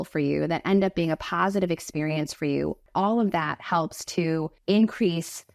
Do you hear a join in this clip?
yes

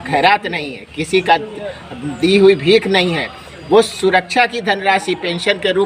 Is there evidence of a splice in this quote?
no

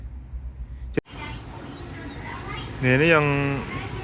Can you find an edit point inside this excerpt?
yes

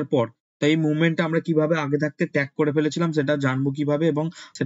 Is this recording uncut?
yes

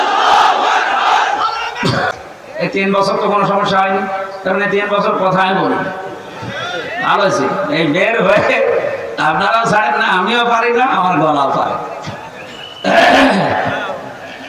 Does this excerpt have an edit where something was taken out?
yes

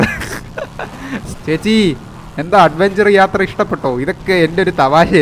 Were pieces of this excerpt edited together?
yes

